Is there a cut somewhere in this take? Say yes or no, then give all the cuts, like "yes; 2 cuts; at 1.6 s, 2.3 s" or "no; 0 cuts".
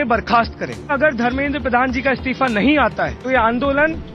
yes; 2 cuts; at 0.9 s, 3.2 s